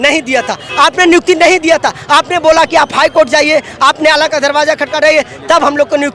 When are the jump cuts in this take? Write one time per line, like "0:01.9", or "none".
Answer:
none